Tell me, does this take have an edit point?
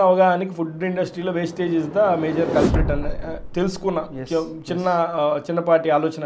no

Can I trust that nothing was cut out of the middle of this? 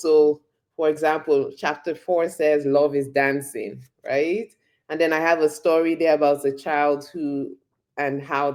yes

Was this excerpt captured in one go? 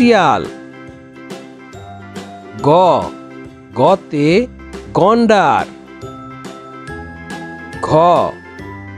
yes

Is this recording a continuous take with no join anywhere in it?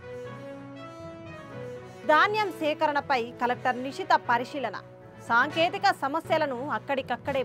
no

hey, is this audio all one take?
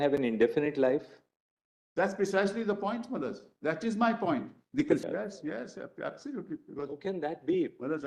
no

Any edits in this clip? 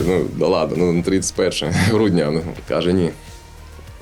yes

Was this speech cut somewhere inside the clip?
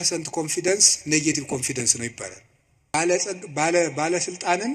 yes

